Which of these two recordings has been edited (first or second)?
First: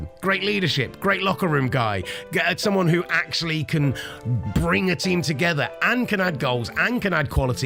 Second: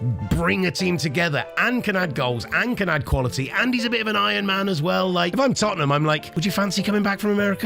second